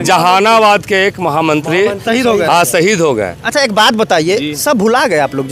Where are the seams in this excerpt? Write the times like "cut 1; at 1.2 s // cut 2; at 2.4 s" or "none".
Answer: none